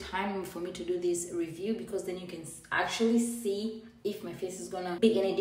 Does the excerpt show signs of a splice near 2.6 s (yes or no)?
no